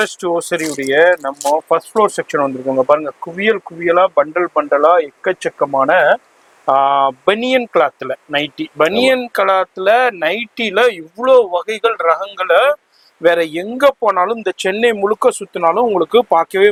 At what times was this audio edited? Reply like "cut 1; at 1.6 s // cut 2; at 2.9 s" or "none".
none